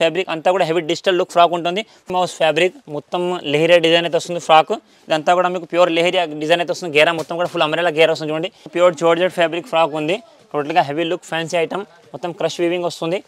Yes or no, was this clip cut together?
yes